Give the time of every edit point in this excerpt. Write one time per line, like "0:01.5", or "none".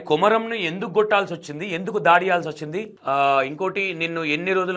none